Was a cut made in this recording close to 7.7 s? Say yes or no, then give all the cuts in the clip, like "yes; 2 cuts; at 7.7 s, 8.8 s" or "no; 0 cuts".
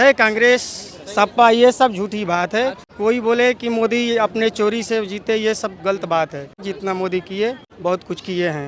yes; 3 cuts; at 2.9 s, 6.6 s, 7.7 s